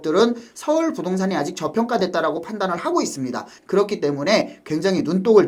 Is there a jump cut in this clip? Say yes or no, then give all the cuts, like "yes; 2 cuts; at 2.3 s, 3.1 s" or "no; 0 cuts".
no; 0 cuts